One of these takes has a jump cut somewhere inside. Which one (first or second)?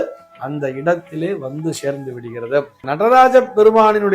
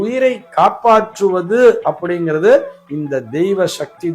first